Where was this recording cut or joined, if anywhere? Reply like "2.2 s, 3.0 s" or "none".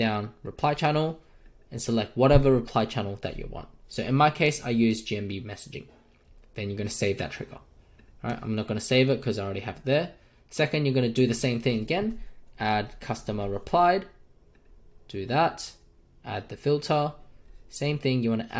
3.8 s